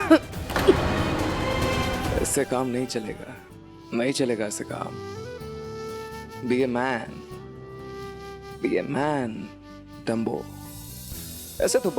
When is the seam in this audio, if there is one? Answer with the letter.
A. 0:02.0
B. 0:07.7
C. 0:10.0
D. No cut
A